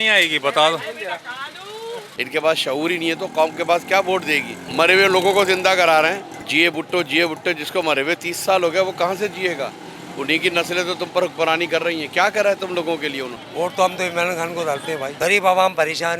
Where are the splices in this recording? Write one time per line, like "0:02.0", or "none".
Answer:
0:02.1
0:04.6
0:06.3
0:13.4
0:15.1

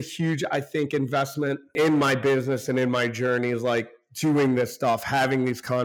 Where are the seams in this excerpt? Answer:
0:01.7

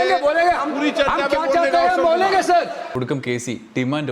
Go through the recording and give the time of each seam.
0:02.8

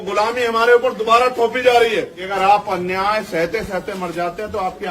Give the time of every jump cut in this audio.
0:02.2

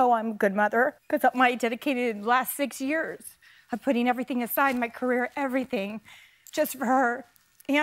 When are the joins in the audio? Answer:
0:01.0

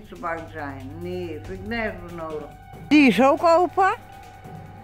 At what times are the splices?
0:02.9

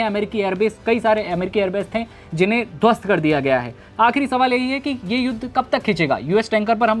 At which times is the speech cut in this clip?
none

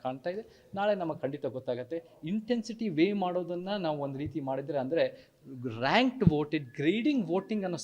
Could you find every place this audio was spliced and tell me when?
0:05.3

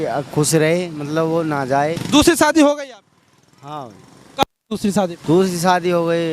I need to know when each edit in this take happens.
0:02.0
0:05.2

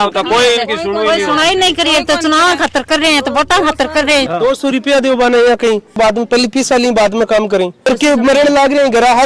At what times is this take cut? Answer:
0:04.3
0:06.0
0:07.9

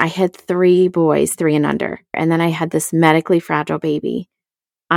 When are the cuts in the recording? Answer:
0:02.1

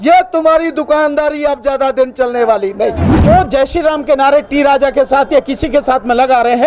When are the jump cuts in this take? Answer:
0:03.2

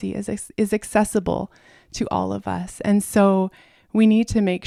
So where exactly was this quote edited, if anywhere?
none

